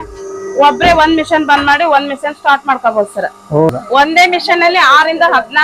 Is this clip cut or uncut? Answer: cut